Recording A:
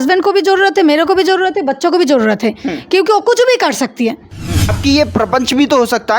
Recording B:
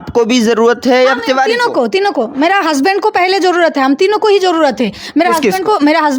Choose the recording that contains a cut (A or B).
A